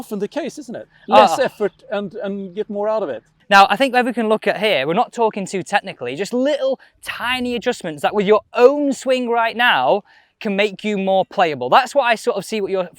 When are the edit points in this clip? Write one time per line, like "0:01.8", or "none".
0:03.3